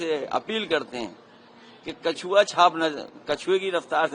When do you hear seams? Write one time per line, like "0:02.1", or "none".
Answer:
none